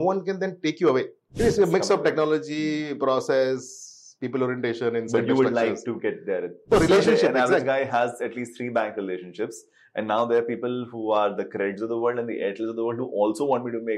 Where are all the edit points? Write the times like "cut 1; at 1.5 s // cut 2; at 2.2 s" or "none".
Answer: cut 1; at 1.2 s // cut 2; at 6.6 s